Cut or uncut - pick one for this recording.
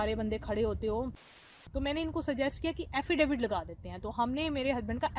cut